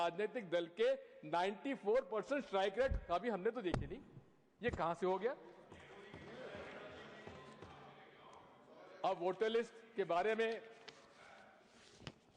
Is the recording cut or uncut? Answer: uncut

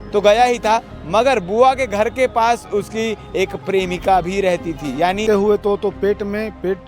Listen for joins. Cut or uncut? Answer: cut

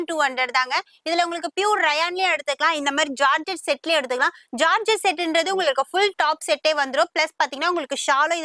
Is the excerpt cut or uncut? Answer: uncut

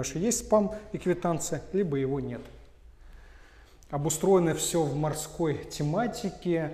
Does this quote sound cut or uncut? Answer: uncut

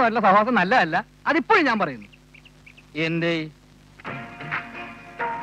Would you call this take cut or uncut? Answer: uncut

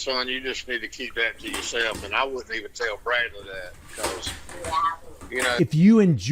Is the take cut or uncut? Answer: uncut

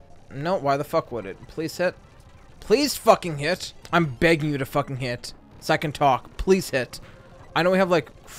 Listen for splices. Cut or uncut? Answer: cut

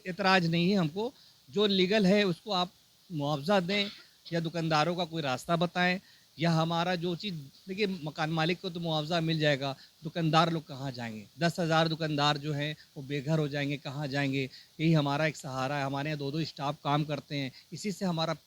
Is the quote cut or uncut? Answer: uncut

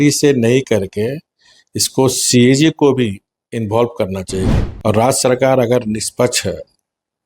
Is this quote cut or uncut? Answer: cut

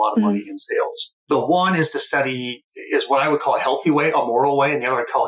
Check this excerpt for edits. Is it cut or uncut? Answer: cut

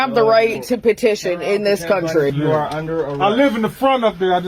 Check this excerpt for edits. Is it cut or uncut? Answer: cut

